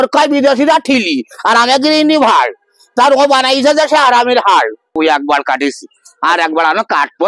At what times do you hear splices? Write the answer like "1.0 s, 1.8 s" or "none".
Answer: 4.9 s